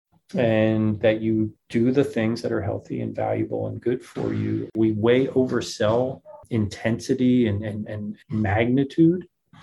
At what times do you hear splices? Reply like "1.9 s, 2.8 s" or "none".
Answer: 4.7 s